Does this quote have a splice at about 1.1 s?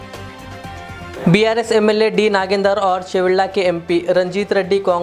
yes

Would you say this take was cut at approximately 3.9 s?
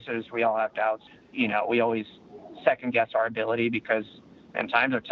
no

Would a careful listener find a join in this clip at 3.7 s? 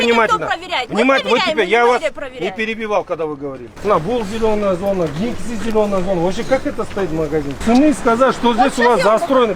yes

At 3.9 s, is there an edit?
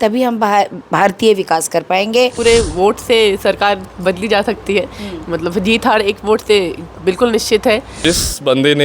no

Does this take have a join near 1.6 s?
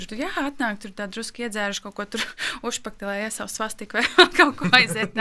no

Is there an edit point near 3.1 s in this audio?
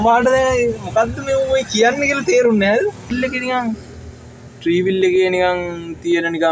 yes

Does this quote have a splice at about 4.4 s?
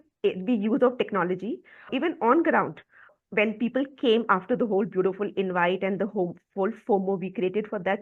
no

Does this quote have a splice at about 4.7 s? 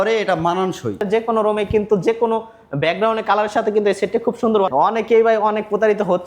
yes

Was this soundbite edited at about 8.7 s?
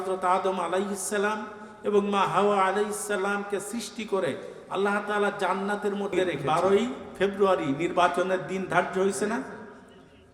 no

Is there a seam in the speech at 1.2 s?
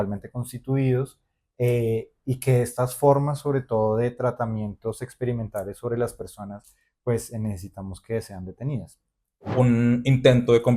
no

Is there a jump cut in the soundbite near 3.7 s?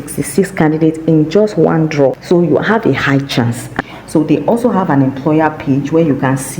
yes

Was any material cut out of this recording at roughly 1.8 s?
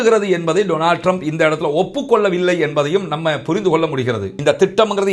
no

